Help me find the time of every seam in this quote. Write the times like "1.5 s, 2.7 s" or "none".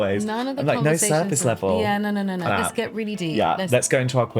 2.5 s, 3.6 s